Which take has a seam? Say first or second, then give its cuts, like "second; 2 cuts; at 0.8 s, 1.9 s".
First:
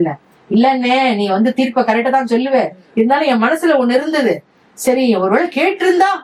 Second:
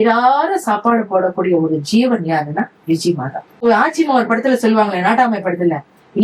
second; 1 cut; at 3.6 s